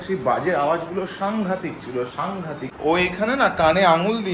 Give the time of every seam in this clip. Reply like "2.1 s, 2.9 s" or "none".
2.6 s

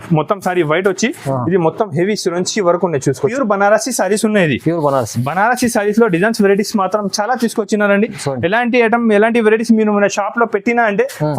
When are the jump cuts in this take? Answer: 3.2 s

